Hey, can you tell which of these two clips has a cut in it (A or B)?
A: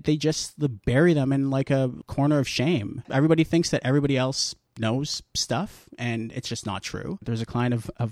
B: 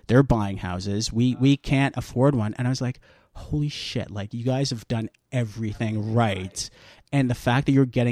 A